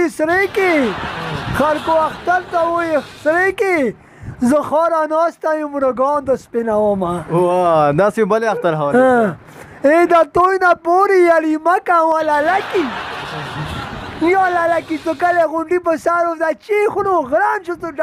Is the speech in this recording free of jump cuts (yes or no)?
yes